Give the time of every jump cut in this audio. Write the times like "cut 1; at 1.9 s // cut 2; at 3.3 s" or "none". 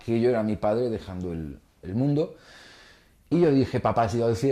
cut 1; at 2.0 s